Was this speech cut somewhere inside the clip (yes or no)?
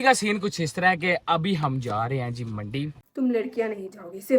yes